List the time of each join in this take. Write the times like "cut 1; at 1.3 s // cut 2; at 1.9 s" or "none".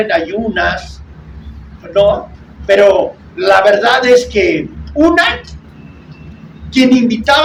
none